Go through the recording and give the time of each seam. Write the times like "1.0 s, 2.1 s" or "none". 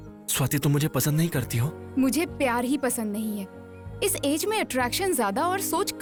none